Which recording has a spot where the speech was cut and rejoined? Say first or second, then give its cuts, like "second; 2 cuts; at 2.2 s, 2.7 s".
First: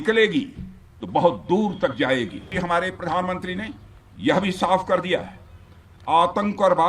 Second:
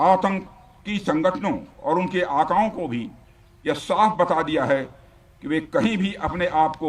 first; 1 cut; at 2.5 s